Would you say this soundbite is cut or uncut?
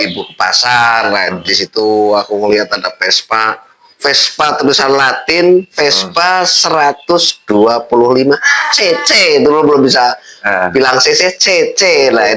uncut